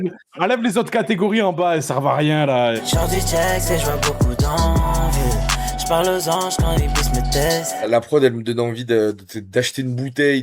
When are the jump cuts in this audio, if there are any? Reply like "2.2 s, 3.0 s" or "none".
2.8 s, 7.9 s